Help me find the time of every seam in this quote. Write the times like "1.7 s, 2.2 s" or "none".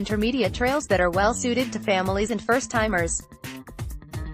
3.2 s